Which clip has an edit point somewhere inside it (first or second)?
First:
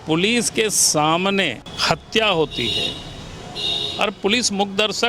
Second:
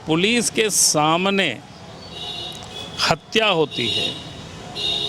first